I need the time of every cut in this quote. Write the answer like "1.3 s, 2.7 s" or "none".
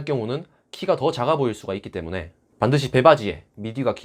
none